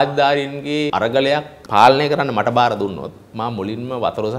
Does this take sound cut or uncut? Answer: cut